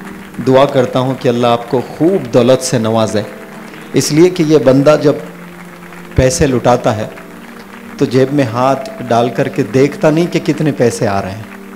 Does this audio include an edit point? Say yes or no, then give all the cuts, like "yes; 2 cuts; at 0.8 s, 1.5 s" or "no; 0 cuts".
no; 0 cuts